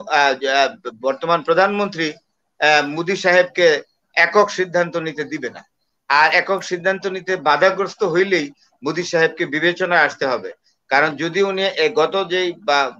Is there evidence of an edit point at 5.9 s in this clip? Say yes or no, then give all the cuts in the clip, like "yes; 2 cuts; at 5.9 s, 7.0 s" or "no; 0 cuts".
no; 0 cuts